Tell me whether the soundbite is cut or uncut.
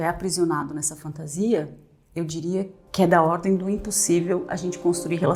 uncut